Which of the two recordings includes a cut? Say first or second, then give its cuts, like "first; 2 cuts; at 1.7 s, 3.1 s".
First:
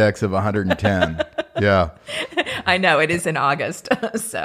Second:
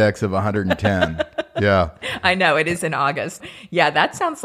second; 2 cuts; at 2.1 s, 3.4 s